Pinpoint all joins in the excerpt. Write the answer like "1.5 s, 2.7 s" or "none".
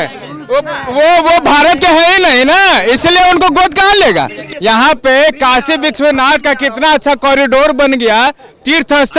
4.4 s